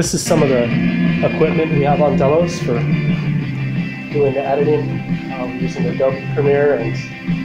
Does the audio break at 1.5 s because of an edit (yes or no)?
no